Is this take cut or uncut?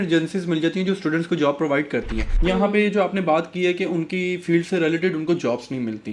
cut